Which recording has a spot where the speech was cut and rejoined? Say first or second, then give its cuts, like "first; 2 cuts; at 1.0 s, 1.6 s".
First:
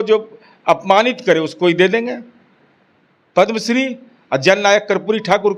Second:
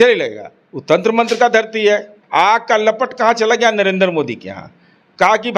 second; 1 cut; at 2.2 s